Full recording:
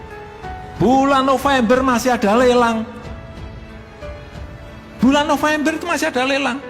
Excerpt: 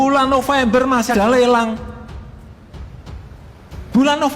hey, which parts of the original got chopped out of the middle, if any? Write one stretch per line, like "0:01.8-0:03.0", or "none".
0:02.1-0:02.2